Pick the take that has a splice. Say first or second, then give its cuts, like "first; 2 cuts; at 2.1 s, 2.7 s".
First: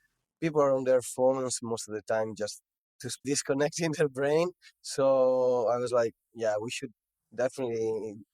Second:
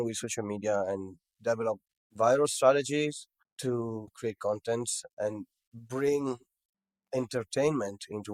first; 1 cut; at 3.1 s